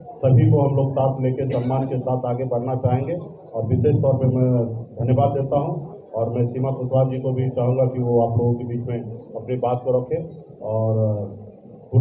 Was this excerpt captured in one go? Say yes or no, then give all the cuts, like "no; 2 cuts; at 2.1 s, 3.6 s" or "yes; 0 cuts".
yes; 0 cuts